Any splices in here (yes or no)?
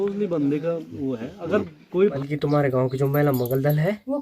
yes